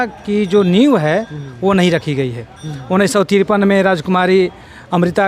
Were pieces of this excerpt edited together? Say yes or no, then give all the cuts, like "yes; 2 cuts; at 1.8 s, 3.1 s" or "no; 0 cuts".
no; 0 cuts